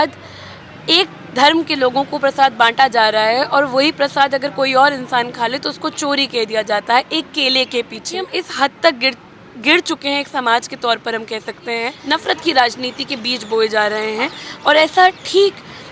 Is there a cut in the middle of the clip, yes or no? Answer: yes